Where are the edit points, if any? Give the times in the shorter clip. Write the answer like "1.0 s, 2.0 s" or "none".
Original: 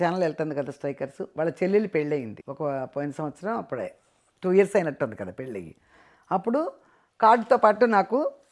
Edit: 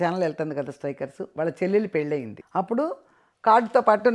2.4 s